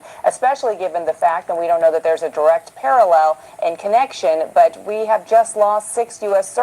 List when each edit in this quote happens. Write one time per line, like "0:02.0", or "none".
0:00.9